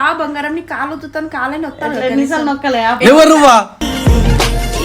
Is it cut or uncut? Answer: uncut